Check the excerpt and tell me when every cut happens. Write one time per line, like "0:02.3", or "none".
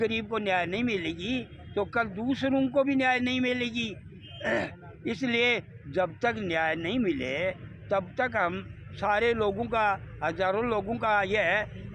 none